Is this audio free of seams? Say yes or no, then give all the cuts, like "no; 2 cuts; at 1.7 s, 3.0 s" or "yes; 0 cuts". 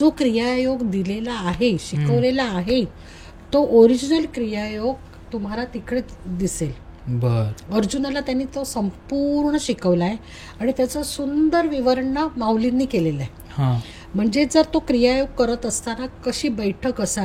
yes; 0 cuts